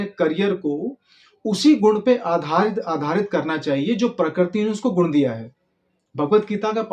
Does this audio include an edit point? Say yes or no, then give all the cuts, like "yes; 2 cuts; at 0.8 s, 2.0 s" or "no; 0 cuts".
no; 0 cuts